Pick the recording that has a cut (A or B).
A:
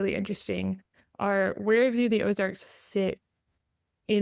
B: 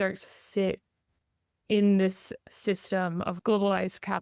B